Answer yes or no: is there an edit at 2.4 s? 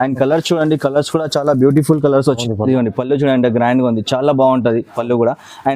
yes